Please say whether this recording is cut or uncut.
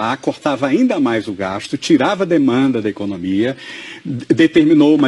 cut